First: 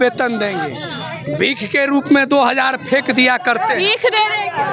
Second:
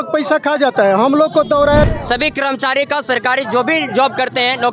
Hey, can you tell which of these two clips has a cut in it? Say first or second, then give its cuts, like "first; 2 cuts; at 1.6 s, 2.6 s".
second; 1 cut; at 1.9 s